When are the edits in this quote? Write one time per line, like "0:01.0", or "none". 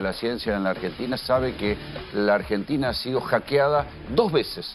none

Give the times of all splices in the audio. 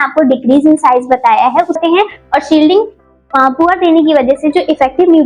0:01.8

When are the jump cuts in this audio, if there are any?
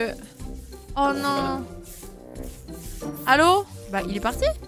0:03.8

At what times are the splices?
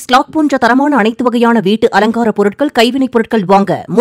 none

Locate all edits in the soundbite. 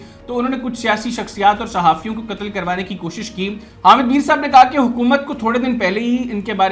0:03.7

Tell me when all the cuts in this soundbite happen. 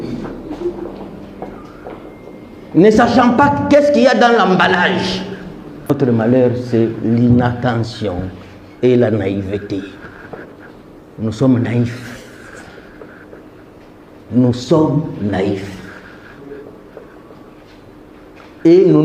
0:05.9

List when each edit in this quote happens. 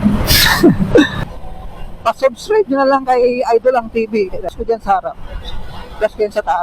0:01.2
0:04.5

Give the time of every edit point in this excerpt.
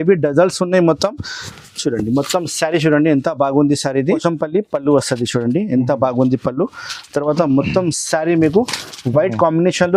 0:04.2

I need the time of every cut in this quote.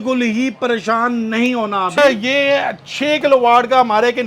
0:02.0

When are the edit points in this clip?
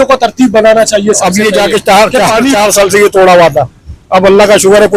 0:01.2

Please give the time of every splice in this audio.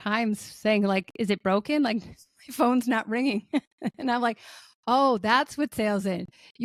none

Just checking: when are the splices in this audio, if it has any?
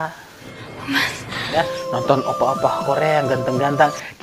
0:01.6

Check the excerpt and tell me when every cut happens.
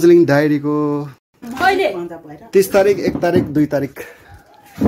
0:01.4

